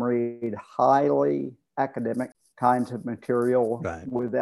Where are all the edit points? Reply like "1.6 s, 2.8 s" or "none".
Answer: 2.4 s